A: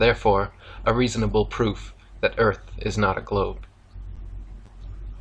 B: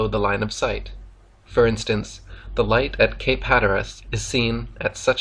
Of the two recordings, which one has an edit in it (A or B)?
A